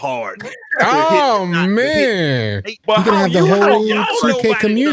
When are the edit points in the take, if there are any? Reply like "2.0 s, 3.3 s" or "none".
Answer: 2.7 s